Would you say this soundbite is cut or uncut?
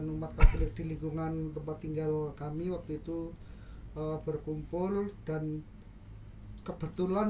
uncut